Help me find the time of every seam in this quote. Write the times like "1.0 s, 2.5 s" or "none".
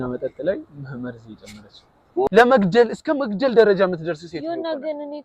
2.3 s